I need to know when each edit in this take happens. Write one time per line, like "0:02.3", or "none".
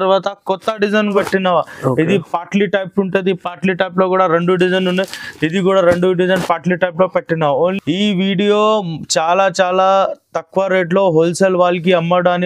0:01.2
0:07.8